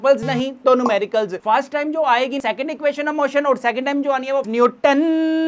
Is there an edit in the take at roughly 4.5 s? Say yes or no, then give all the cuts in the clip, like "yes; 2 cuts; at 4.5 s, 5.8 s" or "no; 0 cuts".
yes; 2 cuts; at 2.4 s, 4.5 s